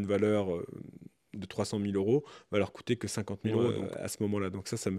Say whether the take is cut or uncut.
cut